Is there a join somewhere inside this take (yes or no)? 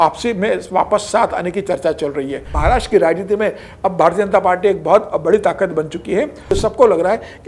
yes